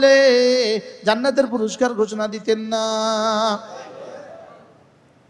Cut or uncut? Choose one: uncut